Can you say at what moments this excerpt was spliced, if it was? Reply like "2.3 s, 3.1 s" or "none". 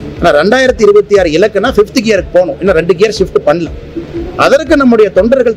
none